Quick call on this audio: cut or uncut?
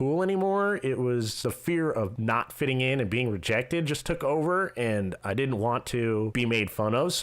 cut